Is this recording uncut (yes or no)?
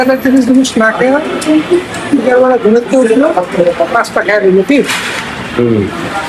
yes